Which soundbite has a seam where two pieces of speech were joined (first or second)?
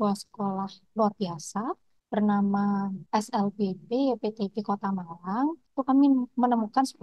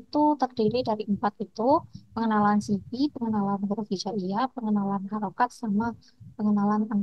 first